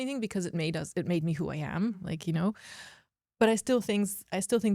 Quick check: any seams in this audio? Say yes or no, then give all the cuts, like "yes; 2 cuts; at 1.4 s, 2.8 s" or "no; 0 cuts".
no; 0 cuts